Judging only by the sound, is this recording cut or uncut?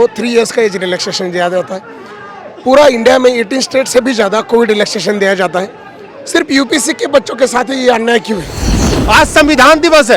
cut